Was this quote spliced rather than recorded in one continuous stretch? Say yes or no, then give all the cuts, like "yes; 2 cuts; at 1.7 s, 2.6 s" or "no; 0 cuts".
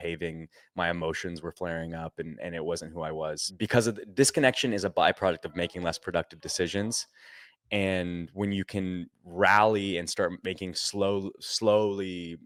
no; 0 cuts